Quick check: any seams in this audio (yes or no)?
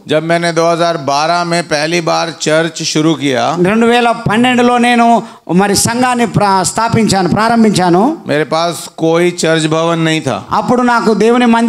no